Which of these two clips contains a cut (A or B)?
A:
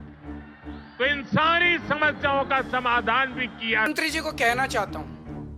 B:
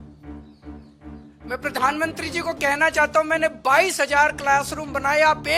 A